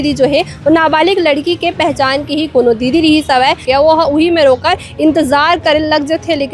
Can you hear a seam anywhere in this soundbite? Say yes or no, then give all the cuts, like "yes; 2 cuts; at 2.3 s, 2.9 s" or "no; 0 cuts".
yes; 1 cut; at 3.6 s